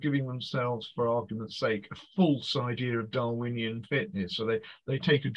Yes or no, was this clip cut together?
no